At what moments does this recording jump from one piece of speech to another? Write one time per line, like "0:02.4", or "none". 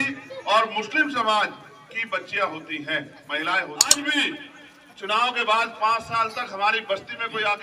0:03.9

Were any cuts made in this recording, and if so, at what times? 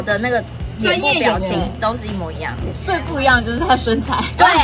0:02.8

